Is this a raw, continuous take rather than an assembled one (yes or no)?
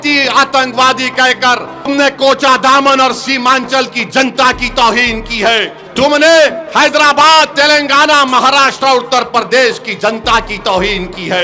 no